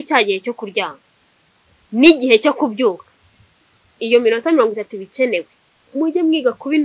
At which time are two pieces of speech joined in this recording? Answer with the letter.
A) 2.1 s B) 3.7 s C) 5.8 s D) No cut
C